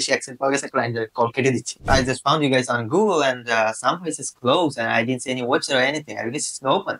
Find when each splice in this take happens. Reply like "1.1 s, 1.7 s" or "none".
1.9 s